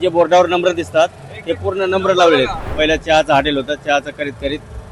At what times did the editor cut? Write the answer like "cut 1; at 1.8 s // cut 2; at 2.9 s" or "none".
cut 1; at 2.6 s